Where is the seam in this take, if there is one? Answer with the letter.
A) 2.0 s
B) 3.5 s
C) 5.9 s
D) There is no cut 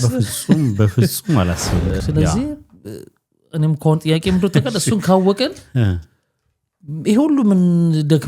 A